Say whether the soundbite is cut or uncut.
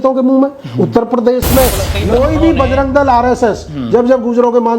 cut